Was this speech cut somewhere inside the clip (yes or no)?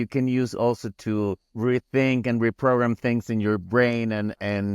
yes